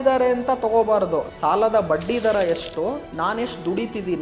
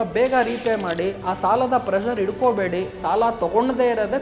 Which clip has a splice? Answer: first; 2 cuts; at 1.3 s, 3.1 s

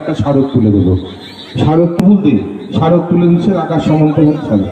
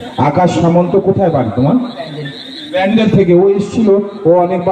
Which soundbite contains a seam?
first; 1 cut; at 2.0 s

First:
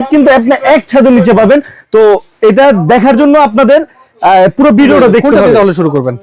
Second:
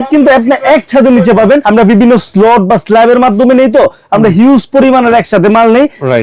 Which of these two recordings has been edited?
second; 1 cut; at 1.6 s

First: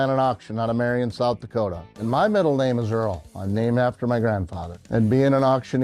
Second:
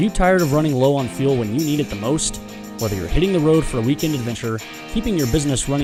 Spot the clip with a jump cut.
first; 1 cut; at 3.4 s

